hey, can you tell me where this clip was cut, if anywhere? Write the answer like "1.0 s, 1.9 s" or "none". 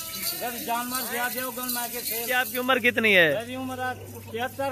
2.6 s

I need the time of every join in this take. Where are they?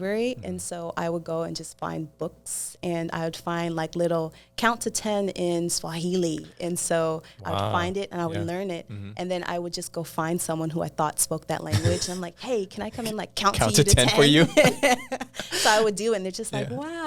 none

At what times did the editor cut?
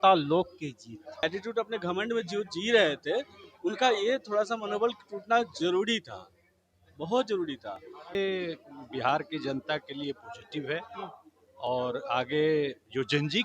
1.2 s, 8.1 s

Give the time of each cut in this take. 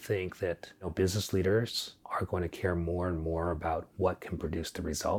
0.9 s, 1.9 s

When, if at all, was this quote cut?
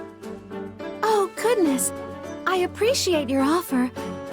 1.0 s

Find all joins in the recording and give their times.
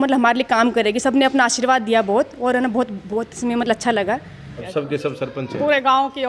4.5 s

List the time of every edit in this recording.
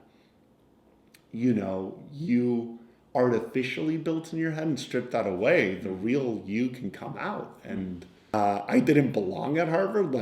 8.3 s

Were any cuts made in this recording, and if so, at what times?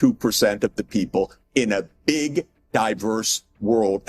none

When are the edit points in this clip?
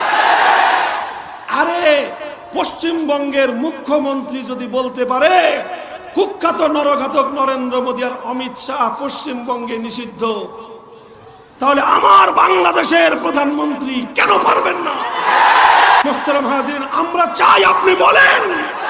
16.0 s

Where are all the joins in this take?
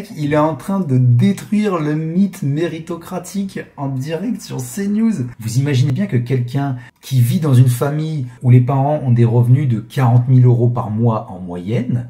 5.4 s

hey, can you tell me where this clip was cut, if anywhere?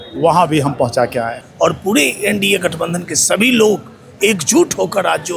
1.4 s

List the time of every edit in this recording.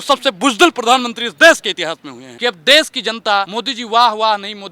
2.2 s, 3.6 s

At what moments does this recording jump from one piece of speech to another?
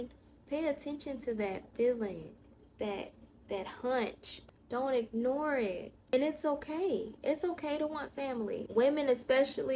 4.3 s, 6.0 s, 8.6 s

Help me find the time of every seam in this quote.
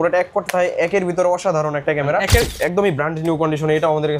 2.5 s

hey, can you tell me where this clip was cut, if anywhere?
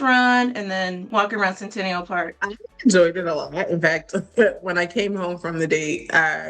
1.0 s, 2.4 s

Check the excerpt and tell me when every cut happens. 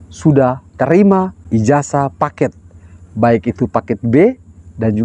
1.4 s

